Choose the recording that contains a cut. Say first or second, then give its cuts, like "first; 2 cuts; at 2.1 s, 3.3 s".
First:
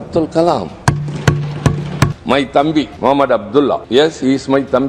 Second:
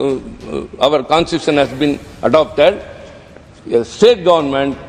first; 3 cuts; at 2.2 s, 2.9 s, 3.8 s